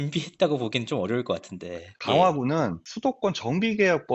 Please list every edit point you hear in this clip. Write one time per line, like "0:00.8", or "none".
0:01.9